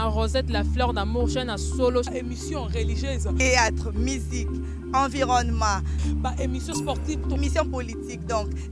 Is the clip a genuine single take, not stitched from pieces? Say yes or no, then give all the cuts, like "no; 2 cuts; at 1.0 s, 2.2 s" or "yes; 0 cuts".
yes; 0 cuts